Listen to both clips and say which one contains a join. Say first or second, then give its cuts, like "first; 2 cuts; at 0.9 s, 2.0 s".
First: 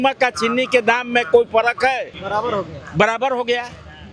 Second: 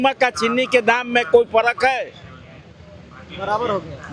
first; 1 cut; at 2.2 s